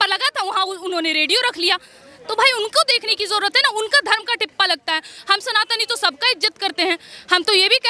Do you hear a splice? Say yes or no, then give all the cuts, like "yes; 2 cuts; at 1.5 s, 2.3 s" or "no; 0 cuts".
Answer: no; 0 cuts